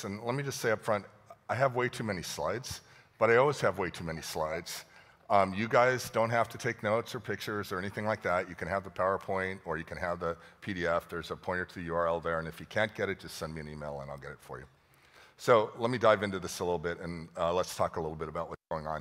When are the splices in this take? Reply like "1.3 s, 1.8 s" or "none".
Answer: 7.7 s